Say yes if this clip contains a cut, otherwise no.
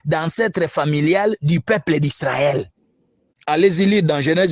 no